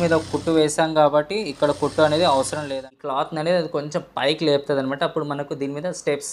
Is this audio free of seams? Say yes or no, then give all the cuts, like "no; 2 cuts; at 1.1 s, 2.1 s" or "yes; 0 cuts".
no; 1 cut; at 2.6 s